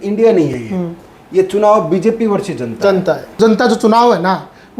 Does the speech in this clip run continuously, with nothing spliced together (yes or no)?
no